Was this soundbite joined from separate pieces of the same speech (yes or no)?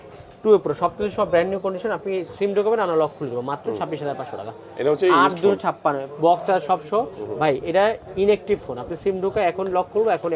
no